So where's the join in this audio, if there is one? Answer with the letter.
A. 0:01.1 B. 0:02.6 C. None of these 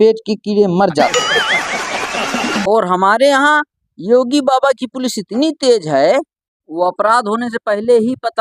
B